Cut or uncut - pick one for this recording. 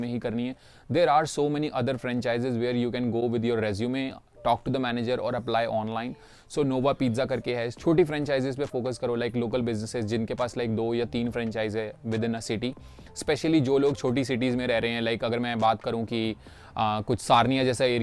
uncut